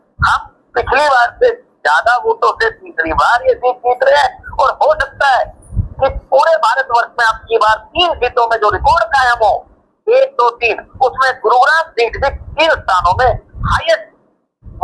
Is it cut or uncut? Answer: cut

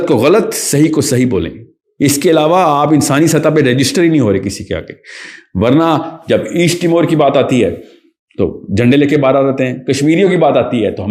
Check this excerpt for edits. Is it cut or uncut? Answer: uncut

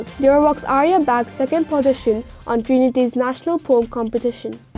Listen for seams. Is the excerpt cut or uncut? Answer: uncut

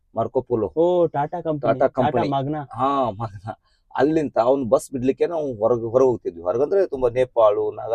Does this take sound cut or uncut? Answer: uncut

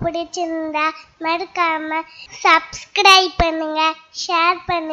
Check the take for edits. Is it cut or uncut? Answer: uncut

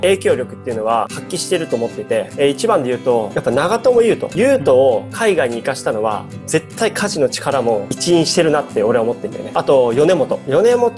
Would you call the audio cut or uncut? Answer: uncut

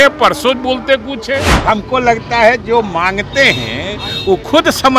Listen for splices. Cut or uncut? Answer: cut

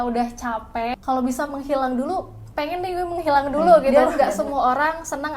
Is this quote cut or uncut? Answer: cut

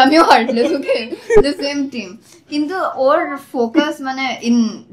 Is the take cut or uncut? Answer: uncut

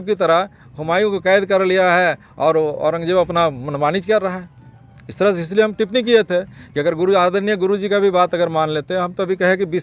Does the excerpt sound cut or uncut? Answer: uncut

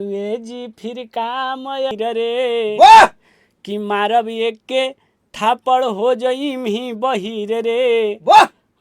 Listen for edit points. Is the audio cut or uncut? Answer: cut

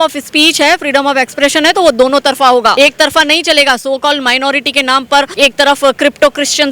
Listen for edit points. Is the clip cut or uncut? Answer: cut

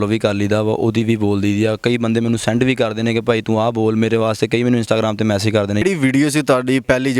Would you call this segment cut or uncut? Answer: cut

